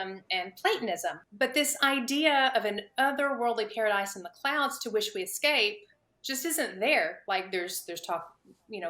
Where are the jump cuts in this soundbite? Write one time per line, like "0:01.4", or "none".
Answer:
0:01.2

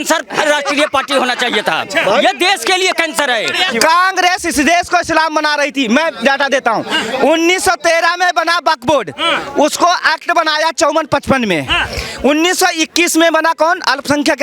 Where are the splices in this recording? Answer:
0:03.7

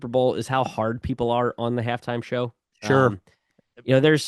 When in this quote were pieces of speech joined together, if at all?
none

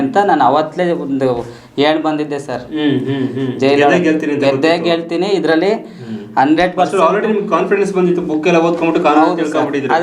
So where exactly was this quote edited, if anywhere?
none

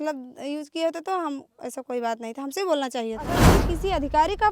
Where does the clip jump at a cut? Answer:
0:03.4

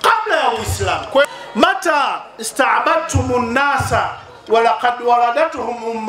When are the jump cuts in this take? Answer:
0:01.3

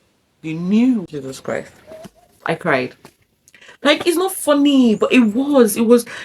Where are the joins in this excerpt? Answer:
0:01.1

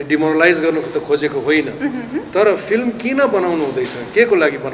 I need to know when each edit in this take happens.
none

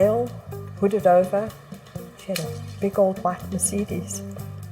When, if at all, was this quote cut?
0:01.7

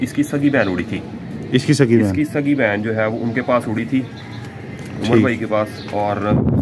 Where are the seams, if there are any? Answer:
none

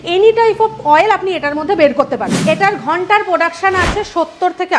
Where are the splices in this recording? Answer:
0:02.4

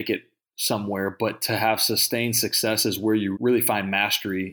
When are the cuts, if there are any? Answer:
0:03.3

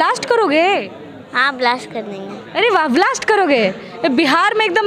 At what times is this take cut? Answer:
none

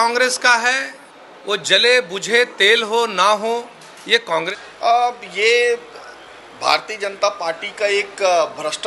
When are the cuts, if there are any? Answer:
0:04.5

